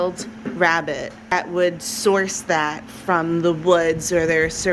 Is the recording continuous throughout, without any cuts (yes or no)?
no